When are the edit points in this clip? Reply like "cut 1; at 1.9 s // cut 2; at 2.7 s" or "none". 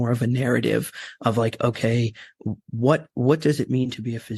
cut 1; at 3.1 s